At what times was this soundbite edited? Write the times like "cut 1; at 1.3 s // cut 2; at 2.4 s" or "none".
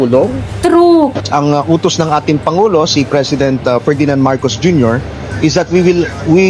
cut 1; at 1.2 s